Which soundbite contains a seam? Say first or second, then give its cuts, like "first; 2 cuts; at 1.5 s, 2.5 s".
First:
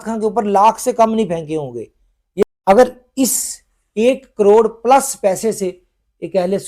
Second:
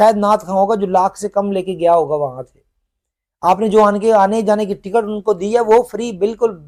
first; 1 cut; at 2.4 s